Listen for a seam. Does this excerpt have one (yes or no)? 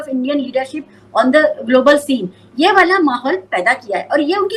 no